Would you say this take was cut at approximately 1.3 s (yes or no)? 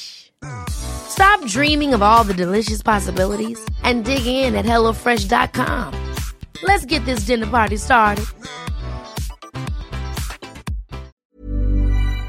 no